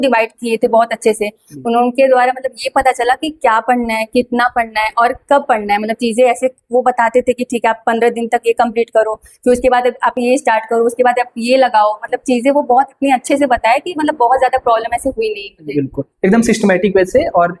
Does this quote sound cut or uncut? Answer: uncut